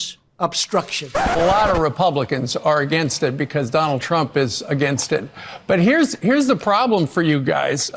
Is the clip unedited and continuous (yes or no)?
no